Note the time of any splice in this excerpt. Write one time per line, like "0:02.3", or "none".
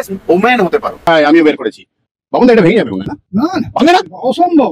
0:01.1